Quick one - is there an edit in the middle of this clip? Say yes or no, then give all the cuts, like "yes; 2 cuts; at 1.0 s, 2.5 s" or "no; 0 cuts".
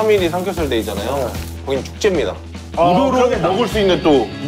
no; 0 cuts